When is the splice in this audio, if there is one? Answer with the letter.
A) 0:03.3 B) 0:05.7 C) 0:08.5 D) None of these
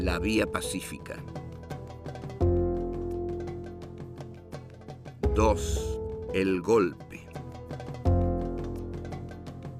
B